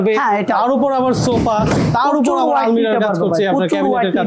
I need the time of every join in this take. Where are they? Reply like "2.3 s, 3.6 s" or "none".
none